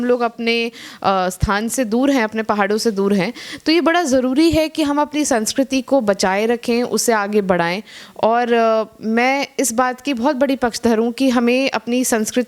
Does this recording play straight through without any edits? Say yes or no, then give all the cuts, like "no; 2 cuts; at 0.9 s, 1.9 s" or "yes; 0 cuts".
yes; 0 cuts